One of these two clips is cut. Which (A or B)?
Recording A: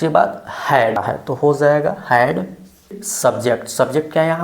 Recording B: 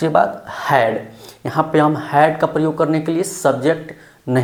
A